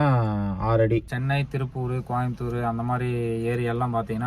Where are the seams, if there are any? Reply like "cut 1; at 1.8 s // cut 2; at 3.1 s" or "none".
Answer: cut 1; at 1.1 s